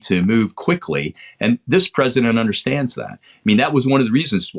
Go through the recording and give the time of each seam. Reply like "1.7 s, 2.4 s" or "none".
none